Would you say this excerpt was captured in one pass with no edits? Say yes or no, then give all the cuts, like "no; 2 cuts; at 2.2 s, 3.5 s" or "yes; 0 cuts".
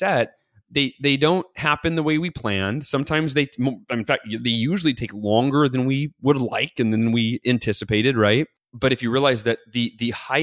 no; 1 cut; at 8.6 s